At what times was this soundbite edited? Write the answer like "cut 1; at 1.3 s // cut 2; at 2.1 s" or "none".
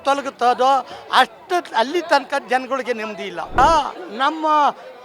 cut 1; at 3.6 s